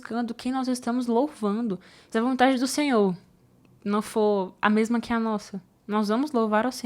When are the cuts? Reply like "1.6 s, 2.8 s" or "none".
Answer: 2.0 s